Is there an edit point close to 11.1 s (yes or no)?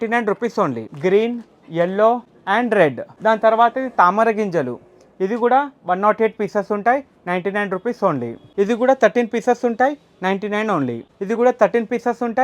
yes